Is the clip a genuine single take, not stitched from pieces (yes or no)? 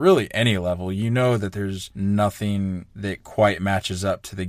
no